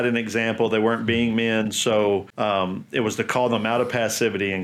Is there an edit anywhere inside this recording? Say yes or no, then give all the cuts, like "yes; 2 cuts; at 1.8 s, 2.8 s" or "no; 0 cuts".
yes; 1 cut; at 2.3 s